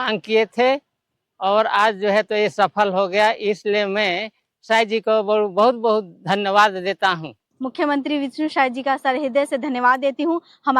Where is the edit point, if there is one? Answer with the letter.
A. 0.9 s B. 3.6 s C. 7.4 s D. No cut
C